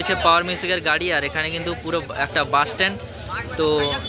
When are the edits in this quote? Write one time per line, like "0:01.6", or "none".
none

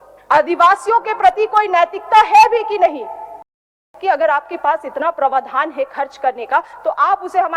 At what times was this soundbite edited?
0:03.8

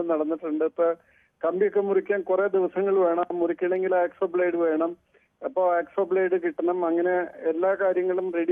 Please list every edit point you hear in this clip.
none

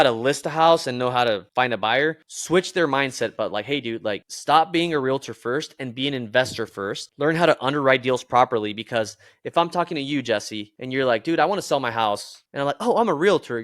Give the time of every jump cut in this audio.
none

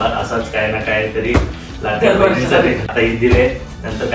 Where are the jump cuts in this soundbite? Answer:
0:02.9

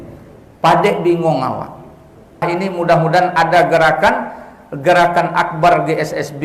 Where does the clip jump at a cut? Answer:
0:02.4

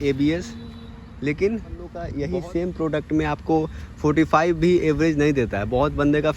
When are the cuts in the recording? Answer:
0:02.0

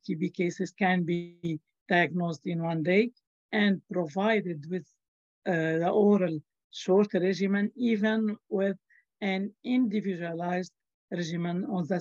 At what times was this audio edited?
none

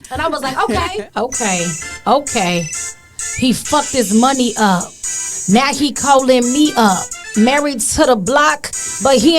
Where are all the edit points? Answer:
0:01.0

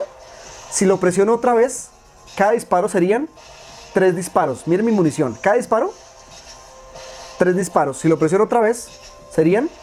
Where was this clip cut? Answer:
none

